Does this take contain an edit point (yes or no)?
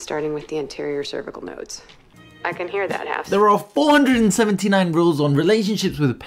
yes